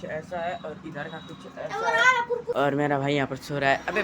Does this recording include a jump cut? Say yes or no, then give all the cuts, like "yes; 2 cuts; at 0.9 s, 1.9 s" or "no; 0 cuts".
yes; 1 cut; at 2.5 s